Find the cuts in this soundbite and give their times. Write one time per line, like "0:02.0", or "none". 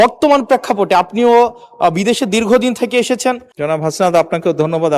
0:03.5